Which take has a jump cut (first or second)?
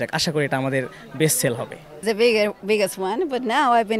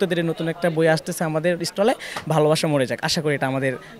first